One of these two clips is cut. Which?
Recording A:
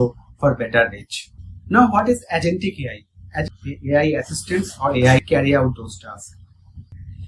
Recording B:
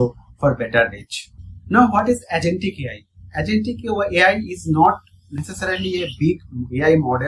A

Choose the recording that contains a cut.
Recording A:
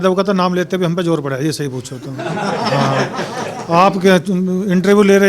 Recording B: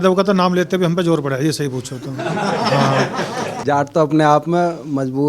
B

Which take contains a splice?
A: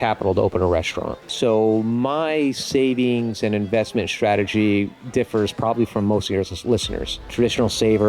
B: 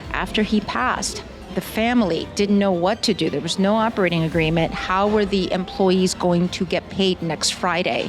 A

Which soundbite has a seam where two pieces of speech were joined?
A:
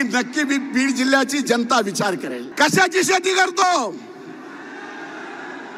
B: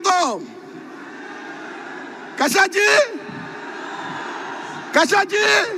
A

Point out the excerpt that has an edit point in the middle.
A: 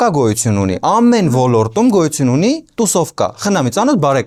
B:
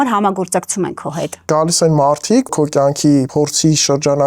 B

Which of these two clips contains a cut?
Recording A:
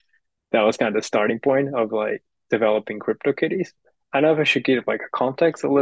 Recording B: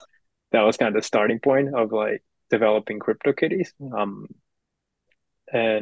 A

